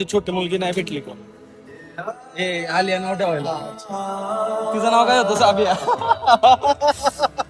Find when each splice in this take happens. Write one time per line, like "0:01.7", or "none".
none